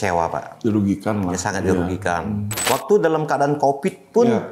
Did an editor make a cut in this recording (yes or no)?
yes